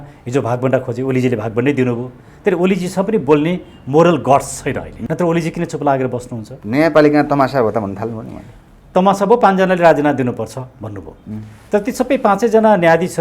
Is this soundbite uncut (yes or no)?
no